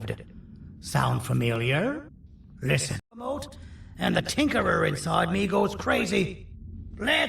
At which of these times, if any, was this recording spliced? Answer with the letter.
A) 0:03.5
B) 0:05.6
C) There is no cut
A